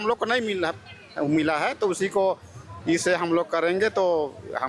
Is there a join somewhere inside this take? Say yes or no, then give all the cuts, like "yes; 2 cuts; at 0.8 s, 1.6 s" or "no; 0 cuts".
no; 0 cuts